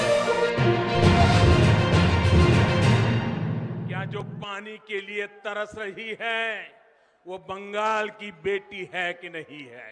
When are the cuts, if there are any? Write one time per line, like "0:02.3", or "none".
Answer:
0:01.3
0:04.3